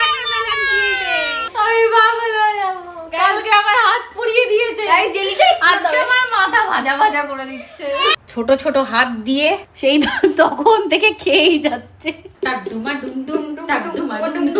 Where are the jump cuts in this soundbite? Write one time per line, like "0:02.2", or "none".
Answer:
0:01.4
0:08.2
0:09.7
0:12.3

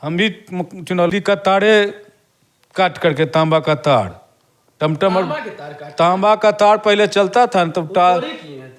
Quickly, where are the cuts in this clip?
0:01.1

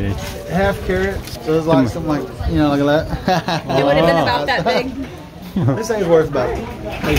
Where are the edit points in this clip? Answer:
0:01.2
0:05.3

